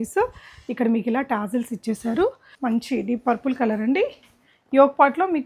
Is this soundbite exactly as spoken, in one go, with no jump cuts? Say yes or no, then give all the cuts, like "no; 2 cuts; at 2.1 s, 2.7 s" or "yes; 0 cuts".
no; 1 cut; at 2.5 s